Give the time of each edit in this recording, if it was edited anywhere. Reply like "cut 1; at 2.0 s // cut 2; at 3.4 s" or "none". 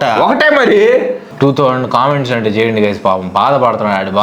cut 1; at 1.2 s

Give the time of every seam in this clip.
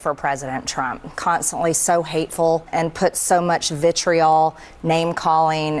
cut 1; at 1.1 s // cut 2; at 2.7 s

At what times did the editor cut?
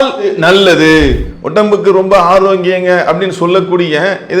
cut 1; at 1.2 s

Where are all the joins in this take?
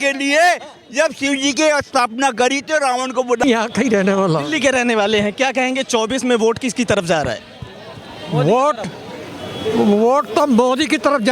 cut 1; at 3.4 s

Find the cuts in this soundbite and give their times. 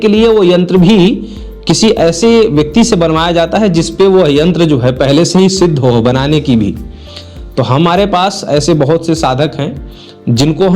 none

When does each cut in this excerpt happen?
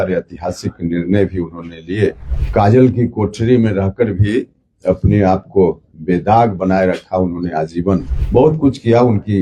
cut 1; at 2.3 s // cut 2; at 8.2 s

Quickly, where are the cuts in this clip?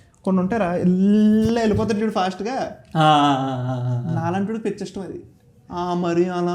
none

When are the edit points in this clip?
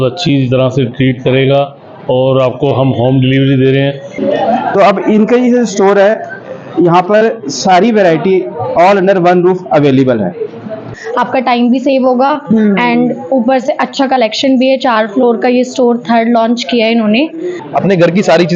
cut 1; at 4.1 s // cut 2; at 11.0 s // cut 3; at 17.6 s

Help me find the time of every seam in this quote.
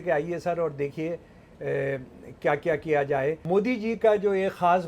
cut 1; at 3.4 s

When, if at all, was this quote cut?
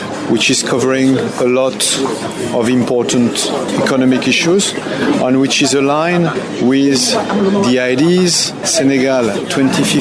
cut 1; at 8.6 s

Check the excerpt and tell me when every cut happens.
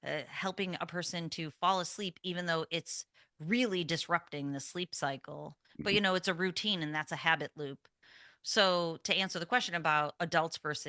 none

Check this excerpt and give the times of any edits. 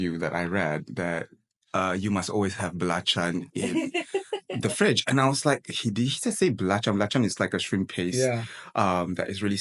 none

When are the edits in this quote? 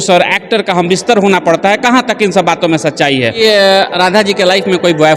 cut 1; at 3.4 s

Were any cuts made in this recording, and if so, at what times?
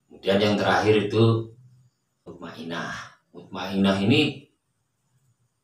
cut 1; at 2.3 s

